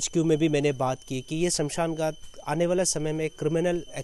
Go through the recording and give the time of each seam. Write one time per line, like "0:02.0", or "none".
none